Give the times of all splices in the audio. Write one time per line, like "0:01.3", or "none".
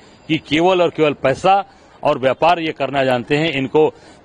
none